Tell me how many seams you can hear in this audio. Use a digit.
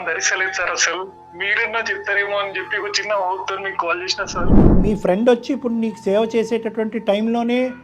1